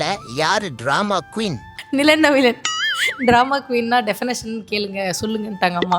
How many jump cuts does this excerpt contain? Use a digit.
1